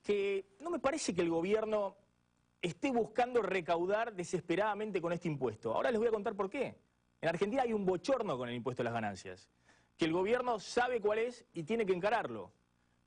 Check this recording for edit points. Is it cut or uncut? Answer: cut